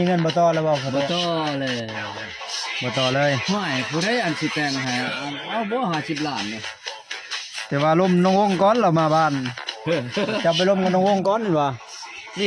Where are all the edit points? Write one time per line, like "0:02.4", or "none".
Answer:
none